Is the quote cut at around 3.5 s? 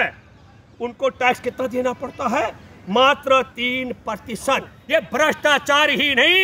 no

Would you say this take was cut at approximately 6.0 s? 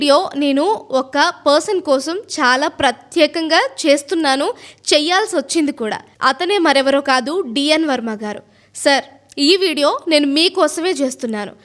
no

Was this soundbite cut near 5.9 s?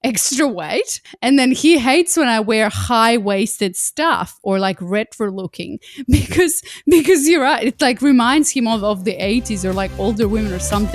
no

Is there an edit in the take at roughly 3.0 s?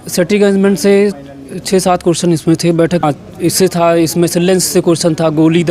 yes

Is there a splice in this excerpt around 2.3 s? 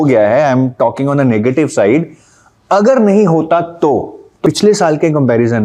no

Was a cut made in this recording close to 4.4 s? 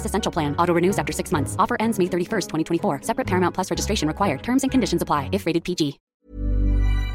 no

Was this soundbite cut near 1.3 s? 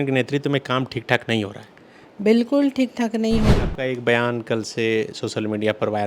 no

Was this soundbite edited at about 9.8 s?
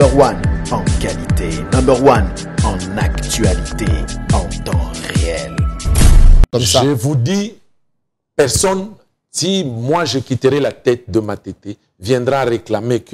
no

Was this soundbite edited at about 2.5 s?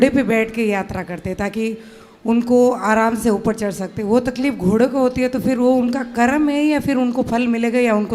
no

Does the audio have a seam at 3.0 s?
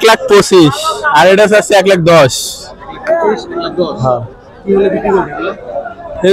no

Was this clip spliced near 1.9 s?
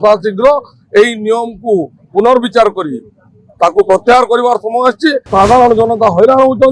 no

